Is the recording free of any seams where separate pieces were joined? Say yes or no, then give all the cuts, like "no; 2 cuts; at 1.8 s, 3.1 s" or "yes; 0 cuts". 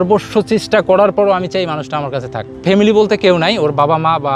yes; 0 cuts